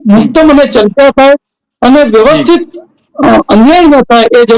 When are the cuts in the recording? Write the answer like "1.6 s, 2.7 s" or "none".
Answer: none